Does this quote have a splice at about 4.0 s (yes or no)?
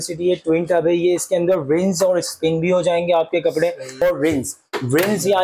yes